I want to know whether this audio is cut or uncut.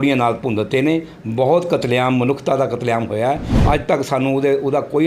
cut